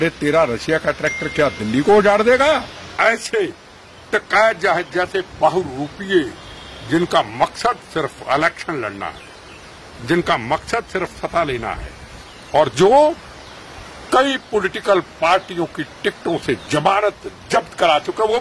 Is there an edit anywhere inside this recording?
yes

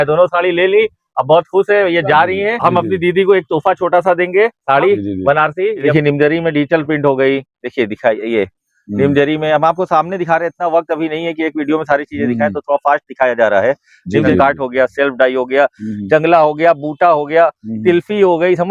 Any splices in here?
yes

